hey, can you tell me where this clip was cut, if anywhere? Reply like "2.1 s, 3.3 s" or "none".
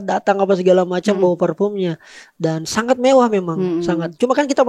none